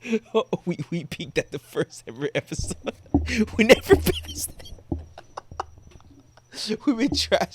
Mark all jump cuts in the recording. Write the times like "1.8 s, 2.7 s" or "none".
none